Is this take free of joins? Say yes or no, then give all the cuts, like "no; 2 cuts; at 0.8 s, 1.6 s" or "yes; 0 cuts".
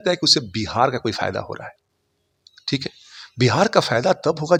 yes; 0 cuts